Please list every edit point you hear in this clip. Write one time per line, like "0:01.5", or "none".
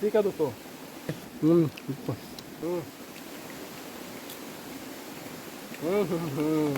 0:01.3
0:02.5